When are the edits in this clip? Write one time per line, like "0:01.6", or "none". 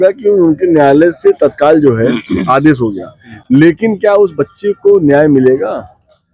none